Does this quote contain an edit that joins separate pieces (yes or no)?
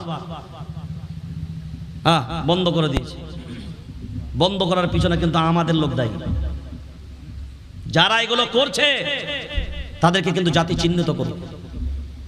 no